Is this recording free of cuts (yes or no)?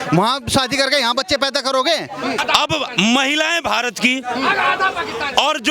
no